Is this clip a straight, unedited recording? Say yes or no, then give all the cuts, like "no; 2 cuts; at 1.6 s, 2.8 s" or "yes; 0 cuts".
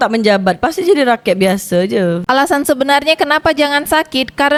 yes; 0 cuts